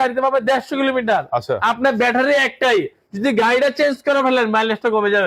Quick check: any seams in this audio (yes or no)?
no